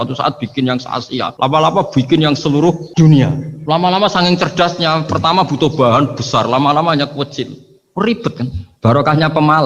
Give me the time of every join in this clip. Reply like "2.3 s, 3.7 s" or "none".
1.3 s, 2.8 s, 3.5 s